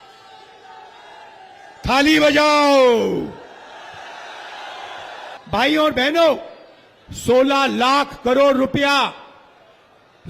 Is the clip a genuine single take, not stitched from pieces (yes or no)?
no